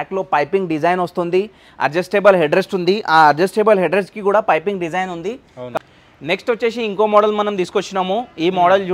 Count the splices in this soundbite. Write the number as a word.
one